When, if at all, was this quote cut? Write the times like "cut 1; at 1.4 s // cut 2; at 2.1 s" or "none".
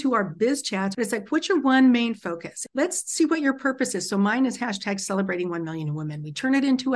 cut 1; at 0.9 s